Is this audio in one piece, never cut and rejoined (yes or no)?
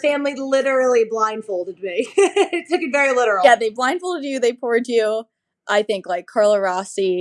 no